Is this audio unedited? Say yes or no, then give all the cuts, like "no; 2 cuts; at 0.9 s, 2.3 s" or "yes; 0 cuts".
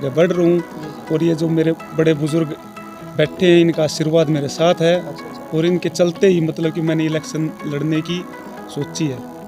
yes; 0 cuts